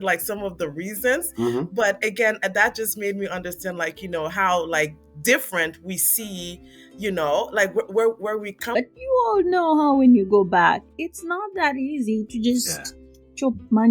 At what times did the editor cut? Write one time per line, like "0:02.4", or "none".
0:08.7